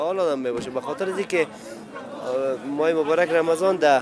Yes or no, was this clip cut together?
no